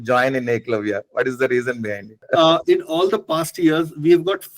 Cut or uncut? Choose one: cut